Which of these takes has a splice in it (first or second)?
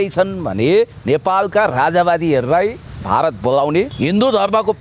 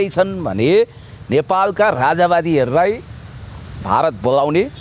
first